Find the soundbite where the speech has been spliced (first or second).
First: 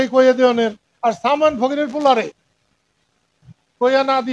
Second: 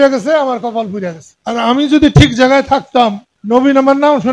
second